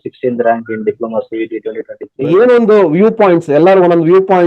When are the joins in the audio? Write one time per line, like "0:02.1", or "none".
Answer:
0:02.1